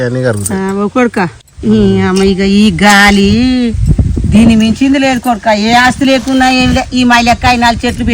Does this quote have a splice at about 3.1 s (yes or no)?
no